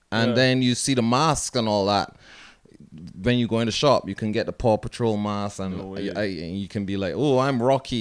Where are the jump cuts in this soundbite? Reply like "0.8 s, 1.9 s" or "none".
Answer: none